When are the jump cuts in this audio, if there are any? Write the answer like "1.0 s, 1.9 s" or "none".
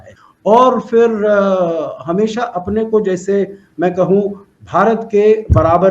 none